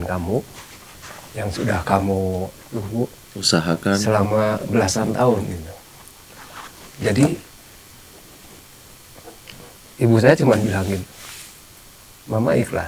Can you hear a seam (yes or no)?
no